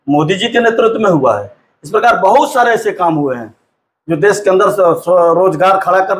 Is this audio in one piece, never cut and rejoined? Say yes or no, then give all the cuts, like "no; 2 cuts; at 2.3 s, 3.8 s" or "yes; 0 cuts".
yes; 0 cuts